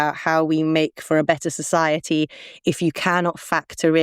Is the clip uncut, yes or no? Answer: yes